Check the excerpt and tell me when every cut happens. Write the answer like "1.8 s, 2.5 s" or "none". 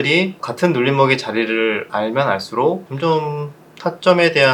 none